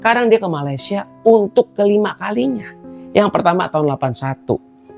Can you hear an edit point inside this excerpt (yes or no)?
no